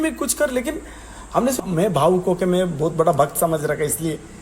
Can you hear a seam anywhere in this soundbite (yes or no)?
yes